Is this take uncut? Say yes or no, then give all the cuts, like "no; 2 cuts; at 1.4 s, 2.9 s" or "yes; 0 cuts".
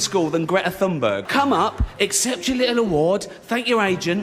no; 1 cut; at 1.2 s